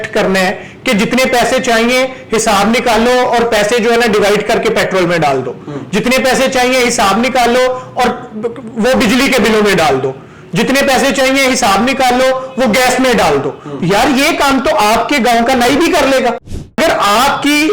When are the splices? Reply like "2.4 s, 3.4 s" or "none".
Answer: 16.8 s